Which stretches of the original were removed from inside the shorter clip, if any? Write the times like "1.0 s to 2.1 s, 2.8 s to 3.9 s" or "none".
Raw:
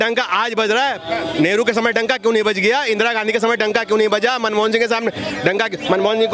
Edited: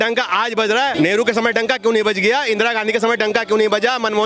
0.9 s to 1.3 s